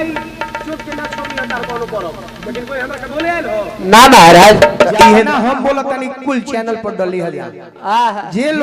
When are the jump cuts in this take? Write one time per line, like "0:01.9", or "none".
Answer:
0:05.3